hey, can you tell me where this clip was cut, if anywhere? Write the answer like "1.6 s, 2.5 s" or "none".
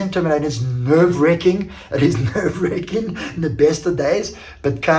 1.7 s